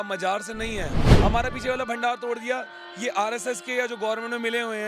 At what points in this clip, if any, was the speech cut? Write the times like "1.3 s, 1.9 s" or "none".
1.1 s